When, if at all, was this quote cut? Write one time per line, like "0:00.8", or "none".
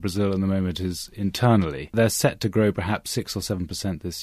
0:01.9